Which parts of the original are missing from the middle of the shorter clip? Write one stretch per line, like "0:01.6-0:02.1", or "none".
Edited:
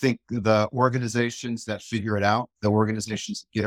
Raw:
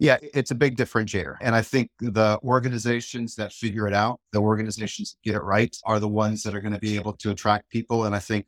none